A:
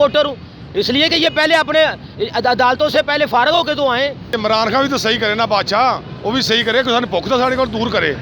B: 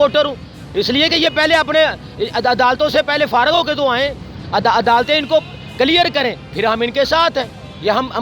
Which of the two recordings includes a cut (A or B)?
A